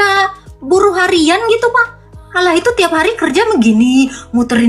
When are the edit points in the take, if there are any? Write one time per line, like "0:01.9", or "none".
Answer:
0:02.1